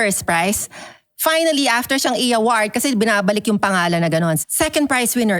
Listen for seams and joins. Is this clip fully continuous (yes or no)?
no